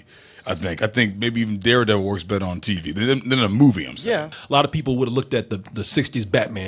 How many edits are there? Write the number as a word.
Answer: one